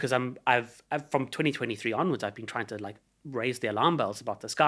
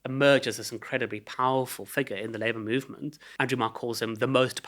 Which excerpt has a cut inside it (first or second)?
second